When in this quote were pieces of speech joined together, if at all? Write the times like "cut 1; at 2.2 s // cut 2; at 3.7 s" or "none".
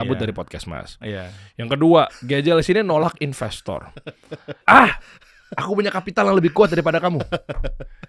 cut 1; at 4.6 s